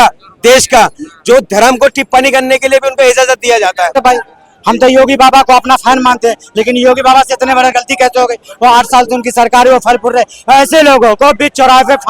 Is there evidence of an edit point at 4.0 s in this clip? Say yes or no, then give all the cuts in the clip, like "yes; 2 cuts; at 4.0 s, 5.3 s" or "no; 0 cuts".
yes; 1 cut; at 4.0 s